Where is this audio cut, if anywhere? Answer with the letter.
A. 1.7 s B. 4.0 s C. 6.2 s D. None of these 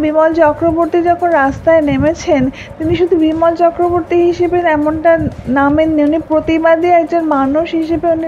C